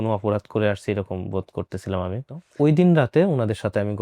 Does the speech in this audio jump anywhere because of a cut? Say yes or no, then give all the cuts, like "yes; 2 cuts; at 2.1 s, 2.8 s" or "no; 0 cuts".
yes; 1 cut; at 2.4 s